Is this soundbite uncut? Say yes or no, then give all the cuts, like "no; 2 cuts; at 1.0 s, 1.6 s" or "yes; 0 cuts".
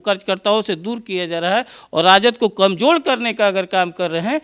yes; 0 cuts